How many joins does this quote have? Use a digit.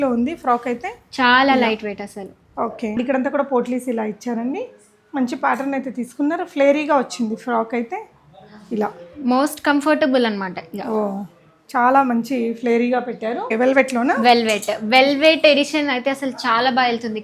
2